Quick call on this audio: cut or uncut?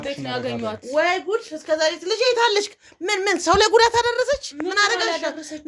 uncut